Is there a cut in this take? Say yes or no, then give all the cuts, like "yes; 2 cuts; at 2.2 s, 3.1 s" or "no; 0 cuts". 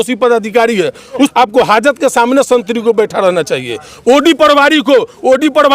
yes; 1 cut; at 1.3 s